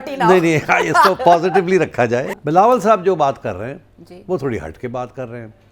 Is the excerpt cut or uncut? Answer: cut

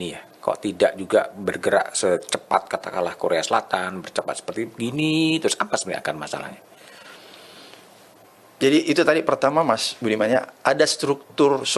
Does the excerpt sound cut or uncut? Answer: uncut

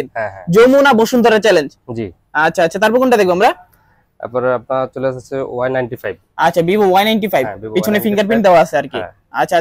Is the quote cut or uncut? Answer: uncut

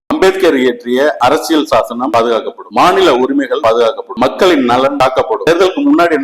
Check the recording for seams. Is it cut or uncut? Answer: cut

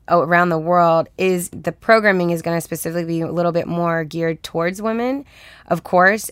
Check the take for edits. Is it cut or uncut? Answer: cut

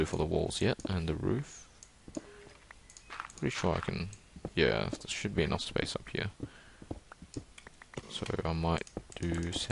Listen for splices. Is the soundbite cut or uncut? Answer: uncut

